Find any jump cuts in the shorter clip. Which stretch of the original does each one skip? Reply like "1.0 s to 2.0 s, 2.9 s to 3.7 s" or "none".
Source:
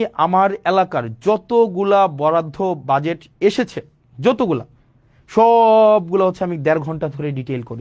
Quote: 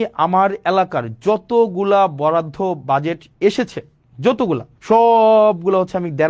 4.7 s to 5.2 s